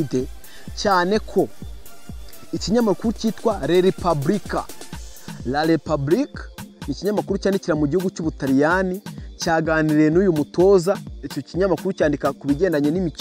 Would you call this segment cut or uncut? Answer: uncut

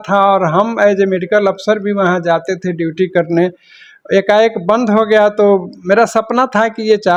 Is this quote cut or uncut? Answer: uncut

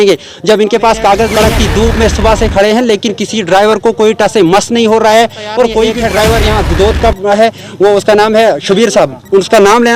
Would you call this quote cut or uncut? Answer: cut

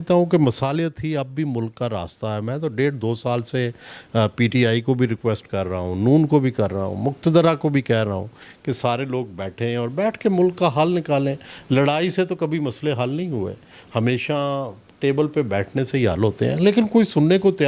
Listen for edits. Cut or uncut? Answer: uncut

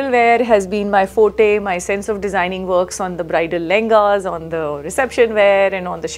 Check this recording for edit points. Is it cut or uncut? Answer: uncut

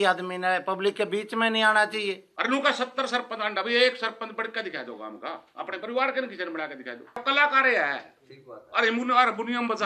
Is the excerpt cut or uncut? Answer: cut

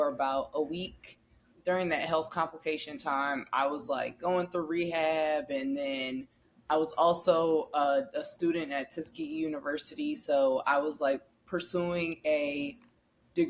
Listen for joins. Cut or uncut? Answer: cut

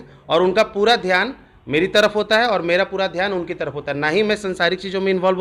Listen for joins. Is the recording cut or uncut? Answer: uncut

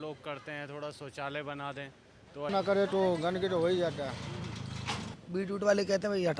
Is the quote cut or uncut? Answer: cut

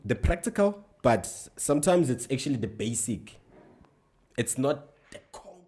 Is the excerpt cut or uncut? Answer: uncut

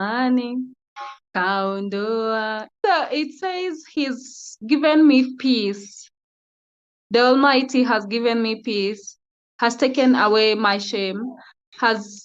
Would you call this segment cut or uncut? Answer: cut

